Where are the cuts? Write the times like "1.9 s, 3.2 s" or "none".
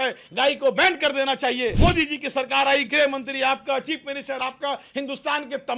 1.8 s